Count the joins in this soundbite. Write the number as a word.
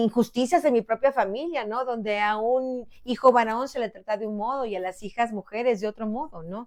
zero